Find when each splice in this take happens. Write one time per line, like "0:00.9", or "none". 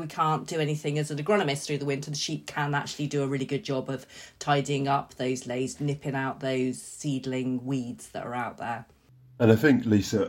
none